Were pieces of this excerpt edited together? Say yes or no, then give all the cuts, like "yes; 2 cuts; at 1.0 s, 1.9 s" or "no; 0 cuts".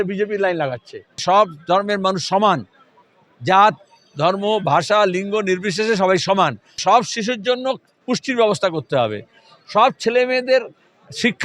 yes; 2 cuts; at 1.2 s, 6.8 s